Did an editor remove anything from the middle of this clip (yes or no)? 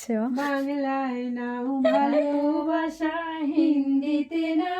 no